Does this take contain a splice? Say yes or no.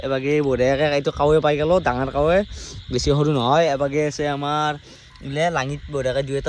no